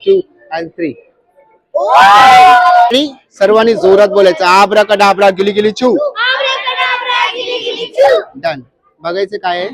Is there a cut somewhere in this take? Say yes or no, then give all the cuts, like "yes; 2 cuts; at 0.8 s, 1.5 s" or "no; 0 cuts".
yes; 1 cut; at 2.9 s